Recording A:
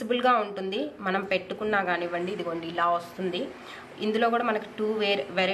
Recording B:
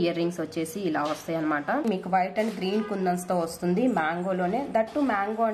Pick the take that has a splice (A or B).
B